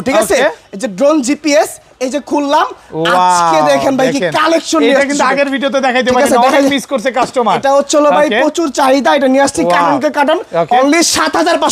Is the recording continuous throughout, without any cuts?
yes; 0 cuts

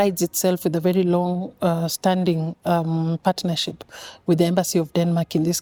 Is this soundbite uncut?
yes; 0 cuts

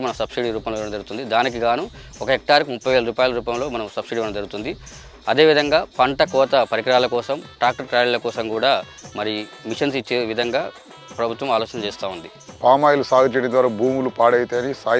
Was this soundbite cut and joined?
no; 0 cuts

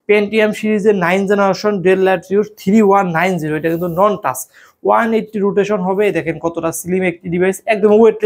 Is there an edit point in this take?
no; 0 cuts

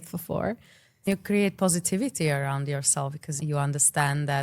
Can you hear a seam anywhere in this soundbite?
yes; 1 cut; at 1.1 s

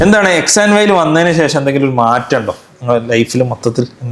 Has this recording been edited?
no; 0 cuts

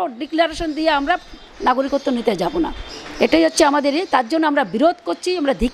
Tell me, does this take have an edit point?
no; 0 cuts

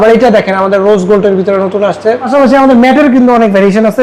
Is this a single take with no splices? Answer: no; 1 cut; at 2.3 s

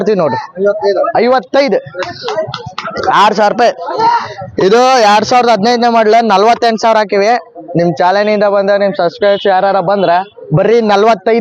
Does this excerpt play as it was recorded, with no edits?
yes; 0 cuts

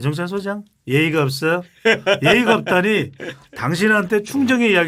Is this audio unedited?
yes; 0 cuts

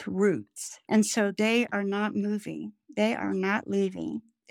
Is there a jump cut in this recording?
yes; 1 cut; at 2.7 s

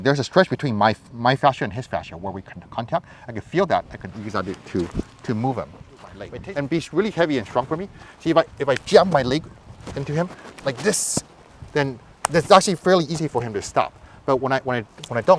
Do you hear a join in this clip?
yes; 1 cut; at 6.2 s

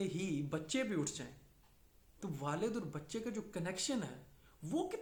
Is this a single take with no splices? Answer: yes; 0 cuts

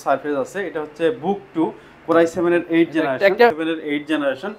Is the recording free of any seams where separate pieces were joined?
no; 1 cut; at 3.5 s

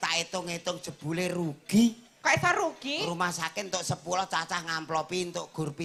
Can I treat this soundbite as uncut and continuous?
yes; 0 cuts

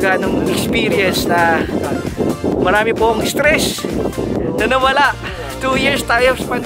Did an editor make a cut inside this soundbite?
no; 0 cuts

